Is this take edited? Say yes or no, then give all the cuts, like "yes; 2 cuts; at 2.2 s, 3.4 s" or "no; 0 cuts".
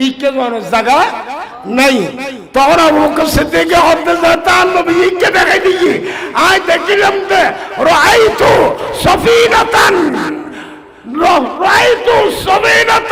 no; 0 cuts